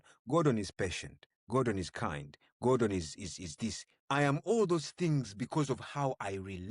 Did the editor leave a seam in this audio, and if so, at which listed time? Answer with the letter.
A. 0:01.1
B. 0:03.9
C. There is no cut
B